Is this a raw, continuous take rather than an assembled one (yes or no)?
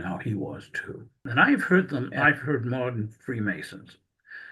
no